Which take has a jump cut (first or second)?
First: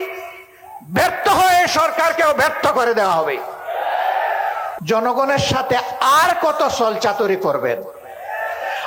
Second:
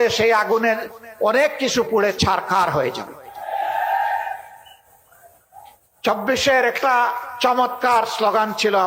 first